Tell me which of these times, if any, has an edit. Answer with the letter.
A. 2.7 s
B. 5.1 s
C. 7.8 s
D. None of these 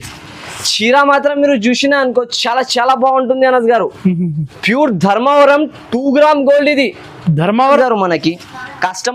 C